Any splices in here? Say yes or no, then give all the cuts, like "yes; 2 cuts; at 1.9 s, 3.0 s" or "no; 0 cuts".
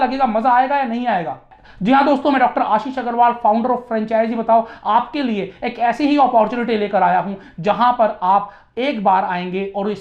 no; 0 cuts